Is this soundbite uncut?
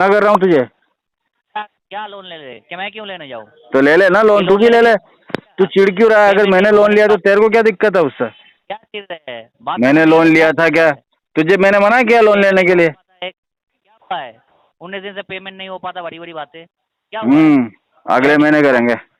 yes; 0 cuts

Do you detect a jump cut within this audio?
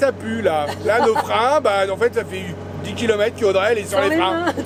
no; 0 cuts

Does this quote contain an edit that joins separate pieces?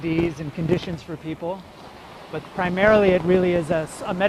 yes; 1 cut; at 1.9 s

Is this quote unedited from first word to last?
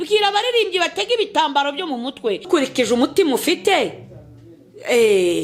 no; 1 cut; at 2.5 s

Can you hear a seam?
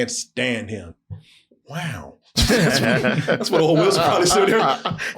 yes; 1 cut; at 0.9 s

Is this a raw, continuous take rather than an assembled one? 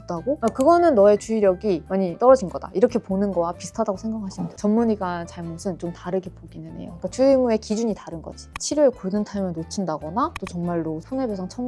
no; 2 cuts; at 4.5 s, 8.6 s

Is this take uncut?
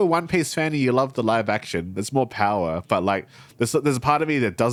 yes; 0 cuts

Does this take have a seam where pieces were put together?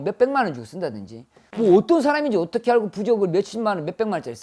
yes; 1 cut; at 1.4 s

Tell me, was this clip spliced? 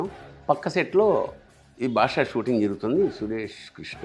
no; 0 cuts

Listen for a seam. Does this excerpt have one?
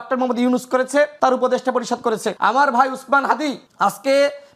yes; 3 cuts; at 1.1 s, 2.3 s, 3.6 s

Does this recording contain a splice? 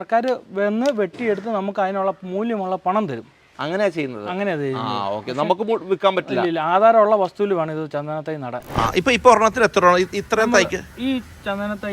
yes; 1 cut; at 8.7 s

